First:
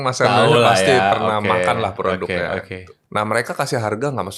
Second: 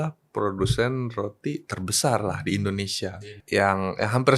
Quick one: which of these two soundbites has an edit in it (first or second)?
second